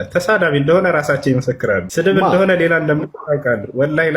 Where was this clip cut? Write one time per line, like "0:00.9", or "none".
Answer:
0:01.9